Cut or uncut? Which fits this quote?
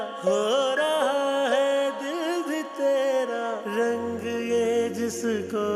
uncut